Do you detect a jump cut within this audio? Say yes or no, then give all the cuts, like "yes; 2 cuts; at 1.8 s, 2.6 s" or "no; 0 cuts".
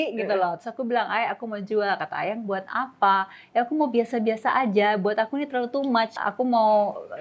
yes; 1 cut; at 6.2 s